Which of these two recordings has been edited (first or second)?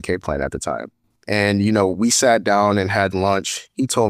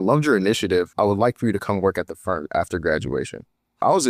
first